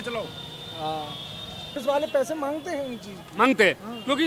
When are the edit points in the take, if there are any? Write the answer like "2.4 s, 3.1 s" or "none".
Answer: 1.8 s